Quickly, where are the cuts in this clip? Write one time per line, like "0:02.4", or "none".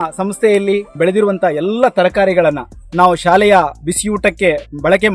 0:00.9